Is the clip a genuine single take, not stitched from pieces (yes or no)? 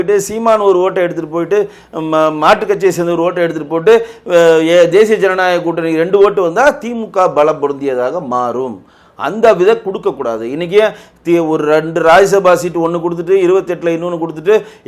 yes